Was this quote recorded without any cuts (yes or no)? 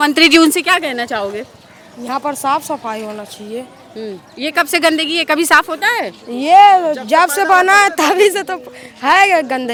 yes